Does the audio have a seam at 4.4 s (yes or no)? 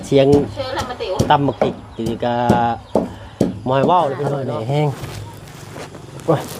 yes